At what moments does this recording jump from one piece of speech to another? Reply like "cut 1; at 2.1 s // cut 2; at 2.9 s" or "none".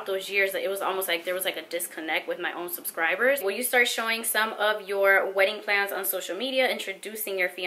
cut 1; at 3.4 s